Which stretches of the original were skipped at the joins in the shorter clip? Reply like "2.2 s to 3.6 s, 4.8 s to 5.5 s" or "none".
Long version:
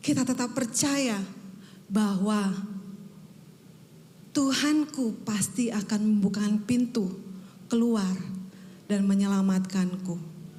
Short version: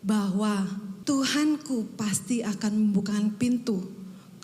2.8 s to 4.2 s